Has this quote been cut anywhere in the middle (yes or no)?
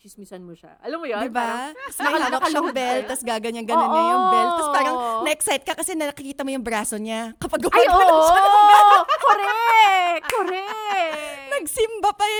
no